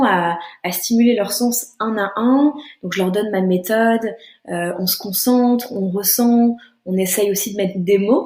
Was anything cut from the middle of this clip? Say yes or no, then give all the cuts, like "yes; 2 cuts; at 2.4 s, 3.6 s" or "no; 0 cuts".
no; 0 cuts